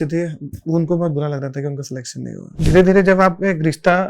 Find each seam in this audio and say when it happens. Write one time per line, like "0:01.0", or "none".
0:02.5